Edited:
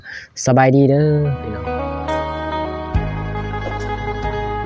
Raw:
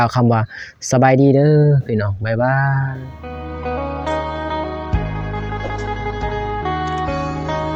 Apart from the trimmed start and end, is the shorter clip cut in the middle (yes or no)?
yes